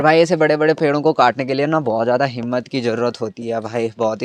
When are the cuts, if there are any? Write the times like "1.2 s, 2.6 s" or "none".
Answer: none

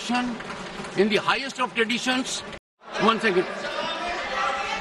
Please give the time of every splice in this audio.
2.9 s

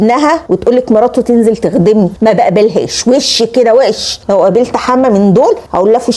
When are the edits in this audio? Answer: none

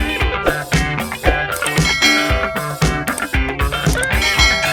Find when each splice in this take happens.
none

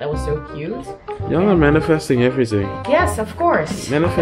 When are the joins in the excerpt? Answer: none

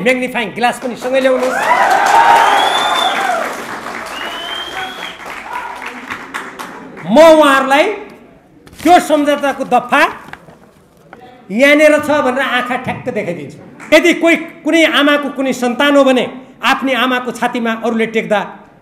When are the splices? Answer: 13.9 s

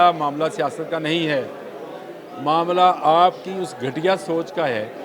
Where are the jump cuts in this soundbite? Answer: none

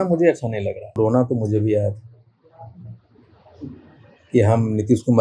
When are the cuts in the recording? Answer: 1.0 s

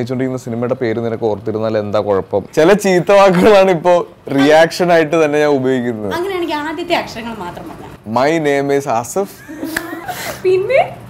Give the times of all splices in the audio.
2.5 s, 7.9 s, 10.0 s

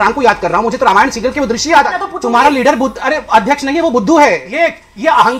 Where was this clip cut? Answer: 2.1 s, 4.5 s

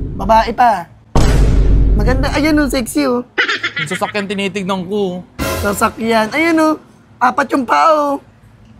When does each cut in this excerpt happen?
none

